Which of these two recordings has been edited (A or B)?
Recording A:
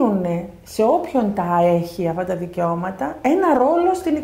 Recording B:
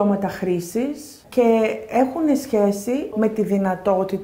B